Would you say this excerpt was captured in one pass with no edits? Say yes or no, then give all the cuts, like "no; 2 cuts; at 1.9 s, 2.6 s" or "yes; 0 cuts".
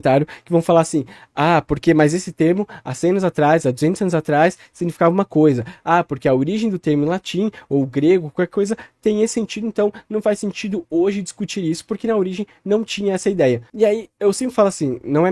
yes; 0 cuts